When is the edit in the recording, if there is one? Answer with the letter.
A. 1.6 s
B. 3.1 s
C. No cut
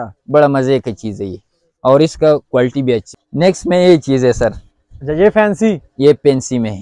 B